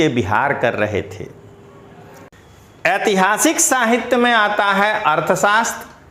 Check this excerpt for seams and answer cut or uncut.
cut